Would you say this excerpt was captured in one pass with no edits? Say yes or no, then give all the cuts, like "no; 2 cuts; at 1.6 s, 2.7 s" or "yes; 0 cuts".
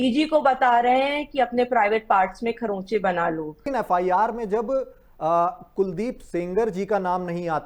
no; 1 cut; at 3.7 s